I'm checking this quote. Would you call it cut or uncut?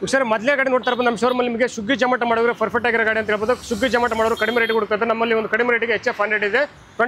uncut